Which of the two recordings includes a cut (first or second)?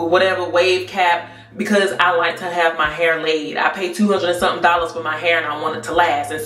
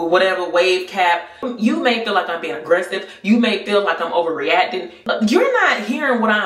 second